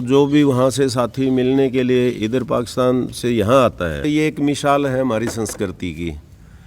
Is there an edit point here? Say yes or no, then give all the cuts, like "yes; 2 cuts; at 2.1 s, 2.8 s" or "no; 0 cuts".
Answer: yes; 1 cut; at 4.0 s